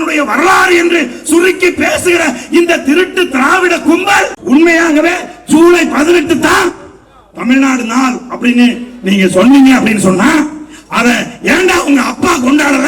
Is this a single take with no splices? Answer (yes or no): no